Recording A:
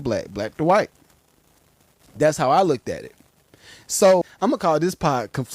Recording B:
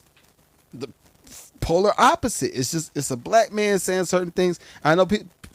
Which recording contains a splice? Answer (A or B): A